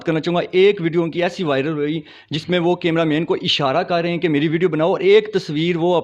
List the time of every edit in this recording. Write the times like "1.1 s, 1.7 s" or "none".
none

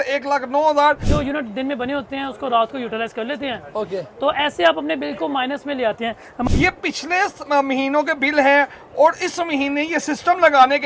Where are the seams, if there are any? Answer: 1.0 s, 6.5 s

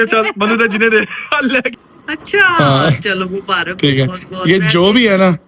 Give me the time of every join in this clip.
1.7 s

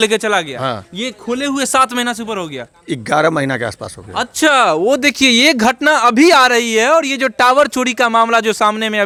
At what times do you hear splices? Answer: none

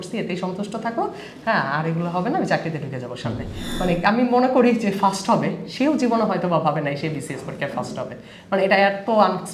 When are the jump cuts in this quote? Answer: 3.6 s

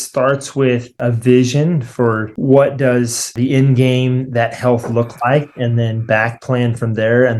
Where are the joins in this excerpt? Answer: 1.0 s, 2.3 s, 3.3 s

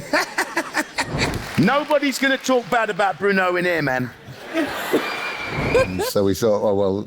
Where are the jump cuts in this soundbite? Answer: 1.3 s, 5.9 s

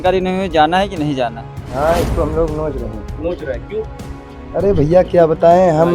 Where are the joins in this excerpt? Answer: 1.5 s

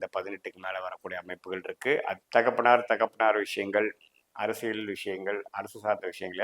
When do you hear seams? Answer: 2.2 s

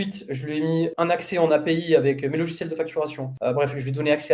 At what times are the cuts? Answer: 0.9 s, 3.3 s

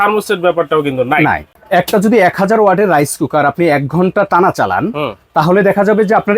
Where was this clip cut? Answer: 1.5 s

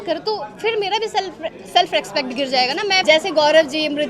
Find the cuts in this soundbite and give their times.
3.0 s

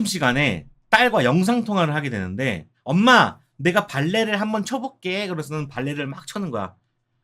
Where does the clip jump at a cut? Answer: none

